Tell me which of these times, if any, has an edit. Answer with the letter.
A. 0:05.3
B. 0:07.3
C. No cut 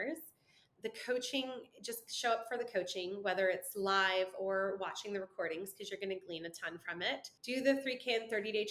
B